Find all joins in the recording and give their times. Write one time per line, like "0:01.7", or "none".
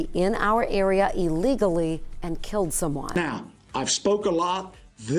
0:03.0